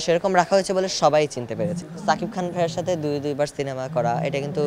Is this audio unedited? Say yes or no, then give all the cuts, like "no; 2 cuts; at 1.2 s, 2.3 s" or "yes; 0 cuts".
no; 1 cut; at 1.8 s